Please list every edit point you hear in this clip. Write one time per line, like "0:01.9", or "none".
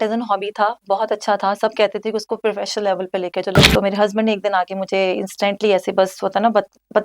0:03.7